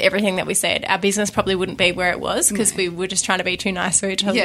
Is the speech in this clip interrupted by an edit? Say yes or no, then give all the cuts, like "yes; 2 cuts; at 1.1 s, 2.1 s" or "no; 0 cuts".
no; 0 cuts